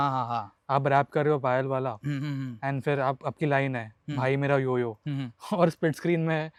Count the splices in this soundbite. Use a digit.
0